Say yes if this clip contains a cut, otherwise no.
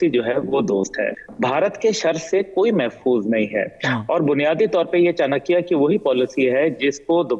yes